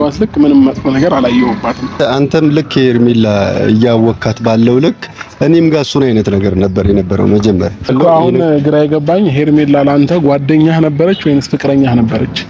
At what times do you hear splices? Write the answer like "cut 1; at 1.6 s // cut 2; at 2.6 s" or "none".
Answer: cut 1; at 2.0 s // cut 2; at 7.8 s